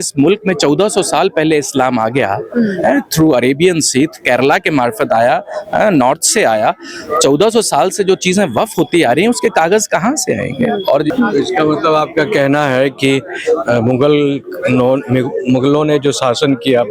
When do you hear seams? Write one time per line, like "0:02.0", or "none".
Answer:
0:11.1